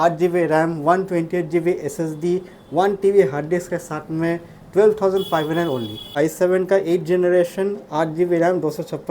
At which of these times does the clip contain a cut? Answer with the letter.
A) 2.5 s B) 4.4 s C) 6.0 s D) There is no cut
C